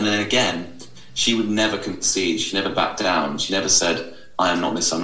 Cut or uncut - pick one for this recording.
uncut